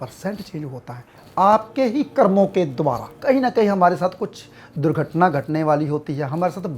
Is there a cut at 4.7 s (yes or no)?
no